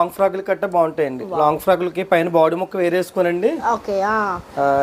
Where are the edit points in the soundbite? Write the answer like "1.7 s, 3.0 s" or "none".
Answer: none